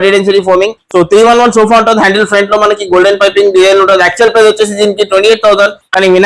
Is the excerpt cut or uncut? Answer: uncut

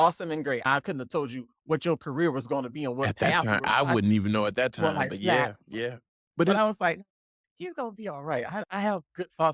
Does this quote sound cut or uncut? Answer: uncut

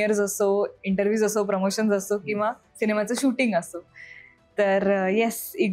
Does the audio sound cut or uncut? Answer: uncut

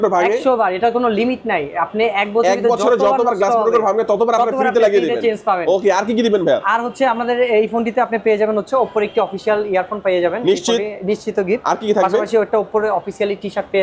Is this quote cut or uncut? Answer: uncut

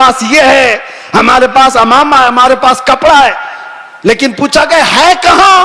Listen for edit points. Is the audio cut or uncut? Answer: uncut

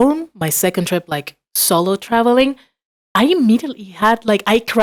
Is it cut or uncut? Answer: uncut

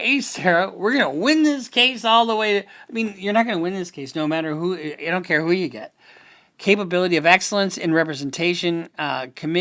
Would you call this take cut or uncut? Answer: uncut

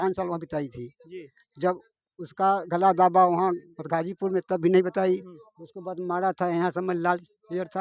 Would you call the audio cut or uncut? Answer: uncut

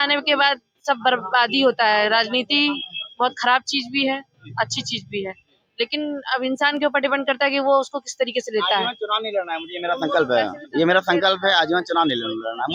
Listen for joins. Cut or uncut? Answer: uncut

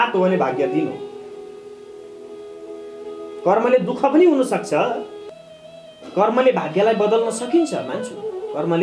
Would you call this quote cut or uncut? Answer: cut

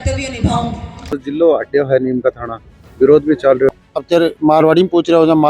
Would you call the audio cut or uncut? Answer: cut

